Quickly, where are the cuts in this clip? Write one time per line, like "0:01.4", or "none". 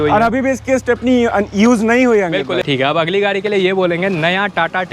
0:02.7